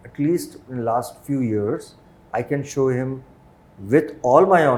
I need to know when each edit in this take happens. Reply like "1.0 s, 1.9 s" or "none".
none